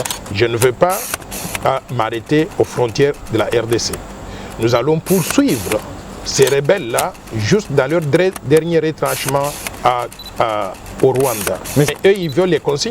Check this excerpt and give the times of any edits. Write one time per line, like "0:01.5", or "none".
0:11.9